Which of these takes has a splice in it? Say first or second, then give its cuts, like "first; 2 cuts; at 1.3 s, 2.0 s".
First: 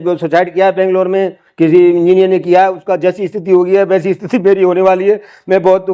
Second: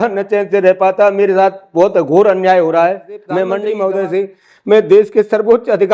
second; 1 cut; at 3.6 s